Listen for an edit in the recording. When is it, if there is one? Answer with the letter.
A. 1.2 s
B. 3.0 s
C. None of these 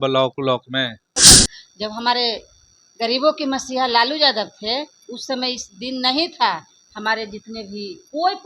A